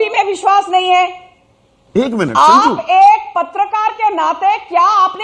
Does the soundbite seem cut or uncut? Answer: uncut